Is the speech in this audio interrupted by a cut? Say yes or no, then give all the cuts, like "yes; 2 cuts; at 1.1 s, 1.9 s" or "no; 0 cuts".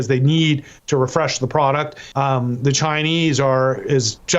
yes; 1 cut; at 2.0 s